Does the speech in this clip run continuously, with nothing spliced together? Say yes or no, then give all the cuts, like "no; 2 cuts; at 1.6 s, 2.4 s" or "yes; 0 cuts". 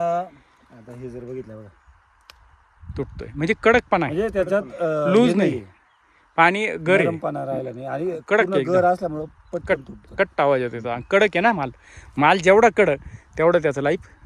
yes; 0 cuts